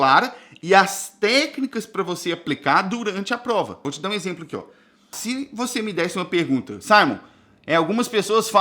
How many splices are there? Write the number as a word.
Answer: two